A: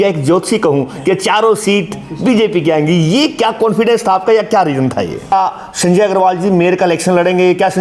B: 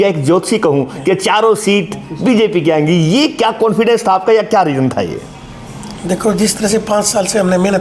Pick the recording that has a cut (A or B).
A